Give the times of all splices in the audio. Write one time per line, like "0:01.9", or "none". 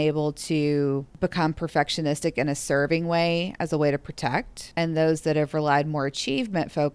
0:01.1
0:04.6

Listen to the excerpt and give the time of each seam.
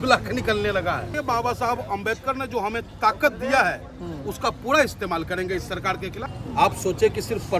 0:01.1
0:06.3

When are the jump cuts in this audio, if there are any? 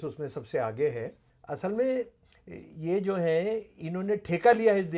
0:01.2

